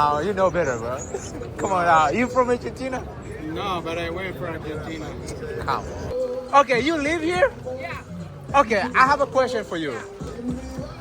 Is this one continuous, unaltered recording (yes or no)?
no